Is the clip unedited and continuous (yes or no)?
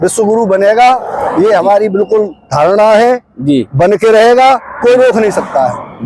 yes